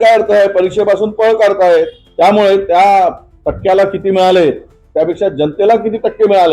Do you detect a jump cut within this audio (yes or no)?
yes